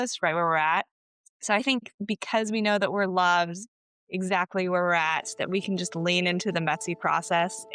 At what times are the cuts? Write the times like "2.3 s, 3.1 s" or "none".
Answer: none